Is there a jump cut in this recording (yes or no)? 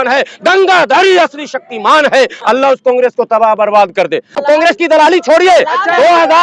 yes